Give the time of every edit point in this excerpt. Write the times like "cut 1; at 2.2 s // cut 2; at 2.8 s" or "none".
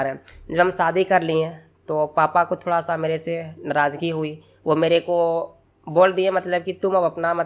none